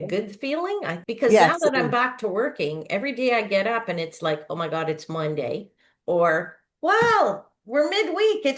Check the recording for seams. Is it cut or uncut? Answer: cut